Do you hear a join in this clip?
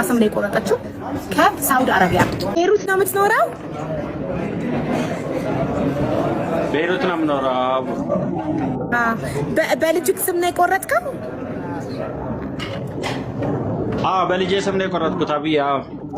yes; 1 cut; at 2.5 s

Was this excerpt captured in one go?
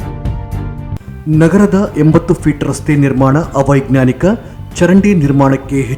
no; 1 cut; at 0.9 s

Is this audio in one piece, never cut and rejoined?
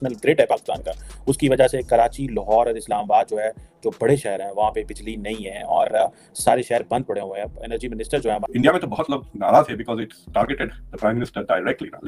no; 1 cut; at 8.4 s

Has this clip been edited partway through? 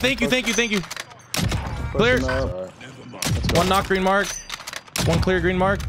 yes; 1 cut; at 2.5 s

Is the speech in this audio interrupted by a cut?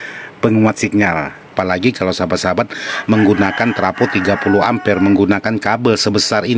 yes; 1 cut; at 1.5 s

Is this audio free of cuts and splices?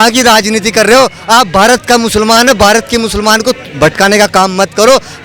yes; 0 cuts

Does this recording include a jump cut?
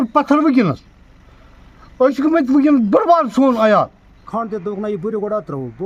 yes; 1 cut; at 4.2 s

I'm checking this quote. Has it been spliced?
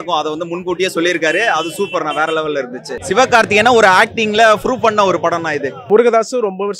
yes; 2 cuts; at 2.9 s, 5.9 s

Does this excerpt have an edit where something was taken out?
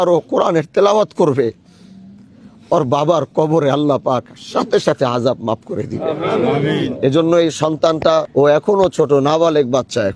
yes; 1 cut; at 8.3 s

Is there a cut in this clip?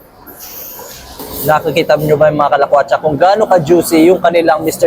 yes; 1 cut; at 1.2 s

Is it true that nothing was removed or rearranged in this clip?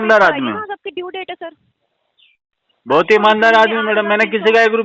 yes; 0 cuts

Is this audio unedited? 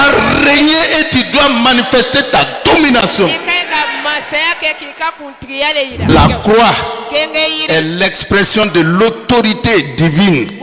no; 2 cuts; at 6.1 s, 8.6 s

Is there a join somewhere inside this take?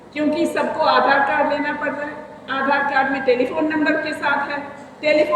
no; 0 cuts

